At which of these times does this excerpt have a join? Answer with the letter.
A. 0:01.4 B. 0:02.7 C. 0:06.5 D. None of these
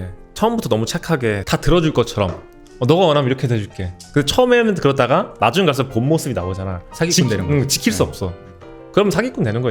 A